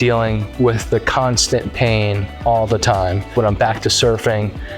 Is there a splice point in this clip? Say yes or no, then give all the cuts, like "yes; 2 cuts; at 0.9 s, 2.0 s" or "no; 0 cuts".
yes; 1 cut; at 3.3 s